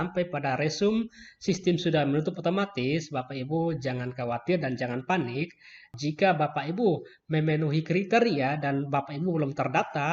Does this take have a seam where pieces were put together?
yes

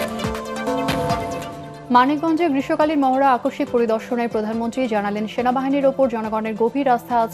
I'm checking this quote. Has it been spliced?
yes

